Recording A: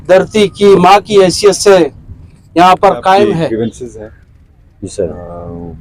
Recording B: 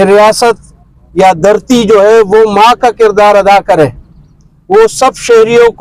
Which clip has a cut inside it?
A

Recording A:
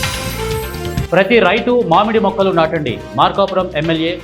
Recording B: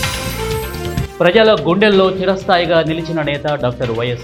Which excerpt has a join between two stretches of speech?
A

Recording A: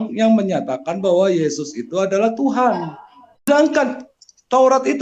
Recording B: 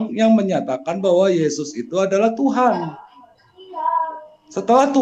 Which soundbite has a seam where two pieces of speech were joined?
A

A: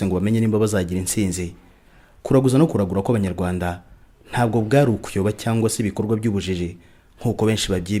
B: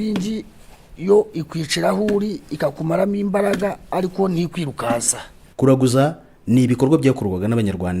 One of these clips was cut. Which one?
B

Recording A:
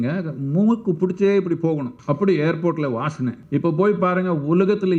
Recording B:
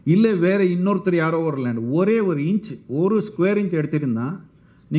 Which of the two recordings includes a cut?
A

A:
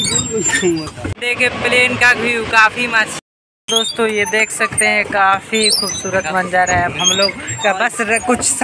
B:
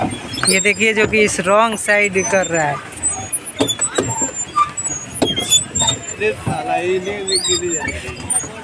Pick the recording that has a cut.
A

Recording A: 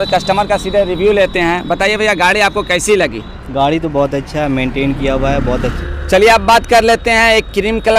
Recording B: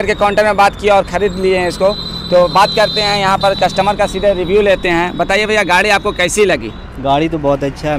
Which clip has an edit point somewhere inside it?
A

